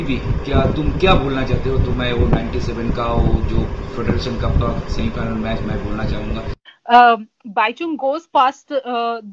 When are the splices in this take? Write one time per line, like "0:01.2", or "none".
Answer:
0:06.7